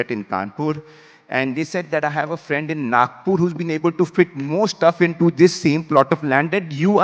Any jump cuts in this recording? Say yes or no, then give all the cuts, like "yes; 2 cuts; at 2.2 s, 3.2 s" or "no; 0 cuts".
no; 0 cuts